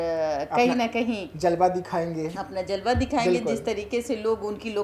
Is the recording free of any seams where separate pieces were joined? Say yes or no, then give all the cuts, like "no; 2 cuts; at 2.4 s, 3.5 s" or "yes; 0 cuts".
yes; 0 cuts